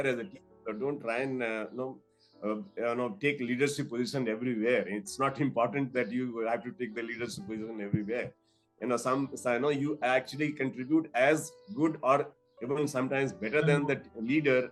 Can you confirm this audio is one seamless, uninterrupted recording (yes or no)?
yes